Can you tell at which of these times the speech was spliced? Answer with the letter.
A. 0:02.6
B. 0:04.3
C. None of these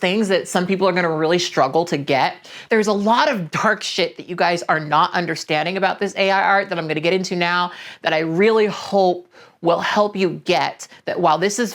A